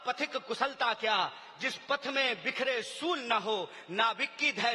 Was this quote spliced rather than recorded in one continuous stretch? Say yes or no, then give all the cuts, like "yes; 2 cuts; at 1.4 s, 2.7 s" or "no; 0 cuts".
no; 0 cuts